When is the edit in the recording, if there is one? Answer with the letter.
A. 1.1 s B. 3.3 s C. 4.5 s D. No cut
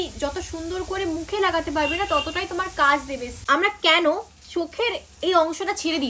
B